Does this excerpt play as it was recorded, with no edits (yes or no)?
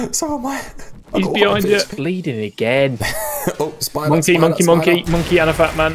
no